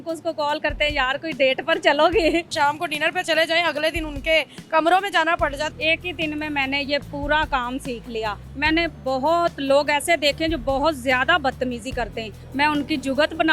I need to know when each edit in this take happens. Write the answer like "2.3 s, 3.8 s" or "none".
2.5 s, 5.7 s, 8.5 s, 12.4 s